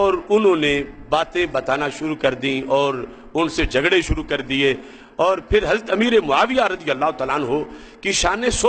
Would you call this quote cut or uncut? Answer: uncut